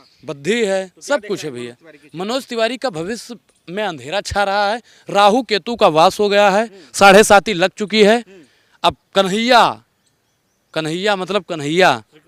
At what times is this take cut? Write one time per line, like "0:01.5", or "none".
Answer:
none